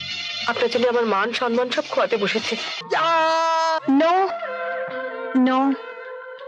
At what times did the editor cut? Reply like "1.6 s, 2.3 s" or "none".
2.7 s